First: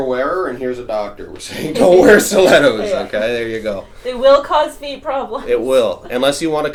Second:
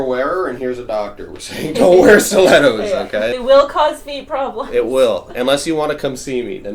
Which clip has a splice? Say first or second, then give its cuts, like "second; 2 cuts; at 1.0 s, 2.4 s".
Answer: second; 1 cut; at 3.3 s